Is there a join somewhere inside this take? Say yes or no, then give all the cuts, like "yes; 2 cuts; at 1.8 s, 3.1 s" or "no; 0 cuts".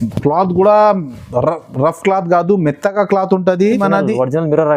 yes; 1 cut; at 3.8 s